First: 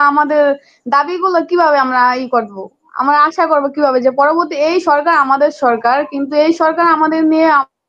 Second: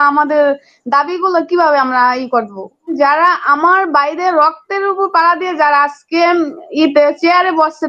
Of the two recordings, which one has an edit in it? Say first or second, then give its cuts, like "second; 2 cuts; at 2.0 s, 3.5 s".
second; 1 cut; at 3.0 s